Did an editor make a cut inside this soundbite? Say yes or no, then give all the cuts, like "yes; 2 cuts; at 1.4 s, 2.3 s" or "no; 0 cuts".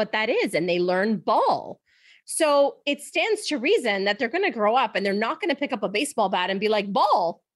yes; 1 cut; at 2.1 s